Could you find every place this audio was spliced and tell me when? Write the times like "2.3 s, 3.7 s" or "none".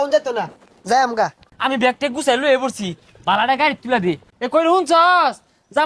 1.4 s, 4.3 s